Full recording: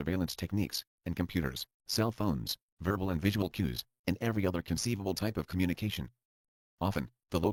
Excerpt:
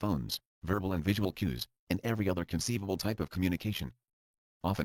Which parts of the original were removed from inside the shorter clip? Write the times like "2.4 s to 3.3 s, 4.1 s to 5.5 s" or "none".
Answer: none